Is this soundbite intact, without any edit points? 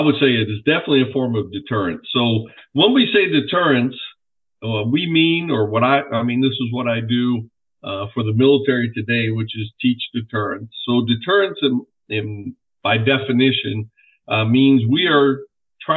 yes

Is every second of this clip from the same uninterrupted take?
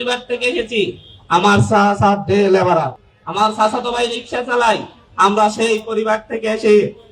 yes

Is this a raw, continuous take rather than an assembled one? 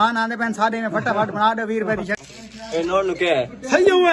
no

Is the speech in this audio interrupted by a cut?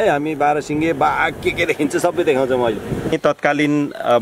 yes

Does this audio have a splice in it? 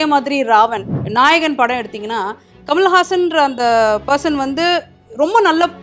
yes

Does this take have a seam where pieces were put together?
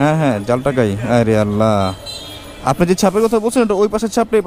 no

